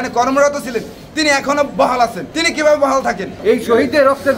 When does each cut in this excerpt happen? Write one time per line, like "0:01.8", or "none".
0:02.3
0:03.3